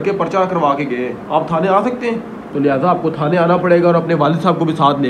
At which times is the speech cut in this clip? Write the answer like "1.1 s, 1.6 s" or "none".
1.2 s, 2.4 s